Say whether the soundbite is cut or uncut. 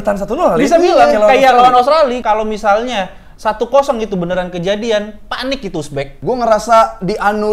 cut